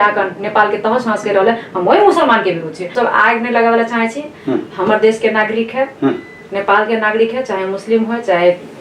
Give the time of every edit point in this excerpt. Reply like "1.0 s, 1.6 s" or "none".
2.8 s